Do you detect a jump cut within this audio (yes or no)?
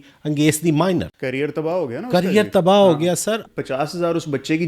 yes